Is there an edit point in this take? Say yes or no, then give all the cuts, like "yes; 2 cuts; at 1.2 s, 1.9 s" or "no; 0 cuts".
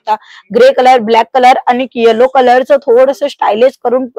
no; 0 cuts